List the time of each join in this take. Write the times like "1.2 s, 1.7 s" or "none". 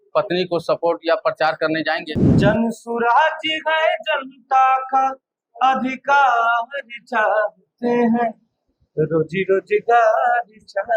2.2 s